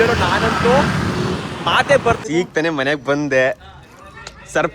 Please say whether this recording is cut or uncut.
cut